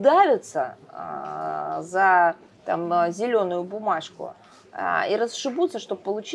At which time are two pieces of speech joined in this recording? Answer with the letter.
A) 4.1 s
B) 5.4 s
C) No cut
C